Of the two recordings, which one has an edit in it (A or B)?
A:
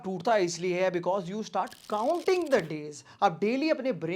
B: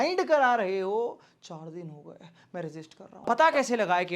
B